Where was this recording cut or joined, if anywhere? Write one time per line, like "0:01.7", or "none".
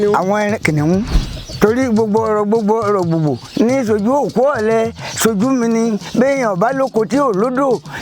0:01.2